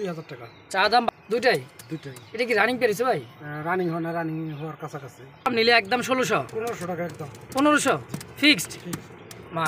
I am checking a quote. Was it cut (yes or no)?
yes